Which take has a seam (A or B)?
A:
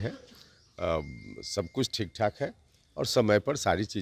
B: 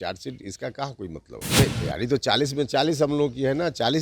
B